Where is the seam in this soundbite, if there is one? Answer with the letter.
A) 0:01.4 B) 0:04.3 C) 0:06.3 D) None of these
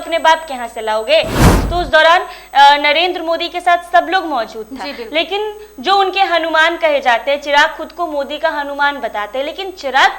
A